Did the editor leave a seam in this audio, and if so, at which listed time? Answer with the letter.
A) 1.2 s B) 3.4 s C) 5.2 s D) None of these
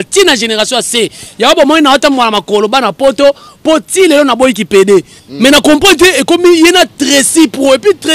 C